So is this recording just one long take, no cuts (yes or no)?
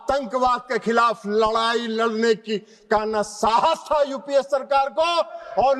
yes